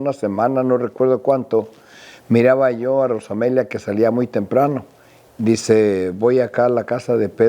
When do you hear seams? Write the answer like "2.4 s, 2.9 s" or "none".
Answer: 5.2 s